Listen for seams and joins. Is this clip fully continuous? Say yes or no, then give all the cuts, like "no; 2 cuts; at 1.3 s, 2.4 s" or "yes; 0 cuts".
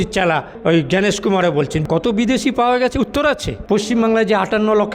no; 2 cuts; at 1.8 s, 3.5 s